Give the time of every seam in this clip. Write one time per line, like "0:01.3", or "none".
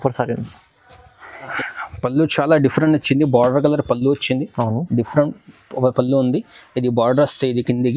0:01.5